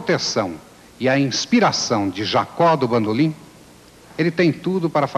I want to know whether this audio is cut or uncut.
cut